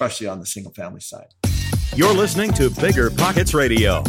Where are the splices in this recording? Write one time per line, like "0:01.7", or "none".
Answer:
0:01.2